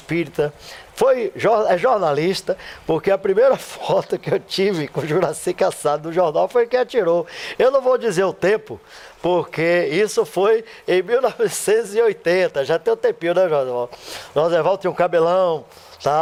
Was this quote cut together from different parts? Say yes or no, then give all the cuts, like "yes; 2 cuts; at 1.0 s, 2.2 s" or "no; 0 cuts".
no; 0 cuts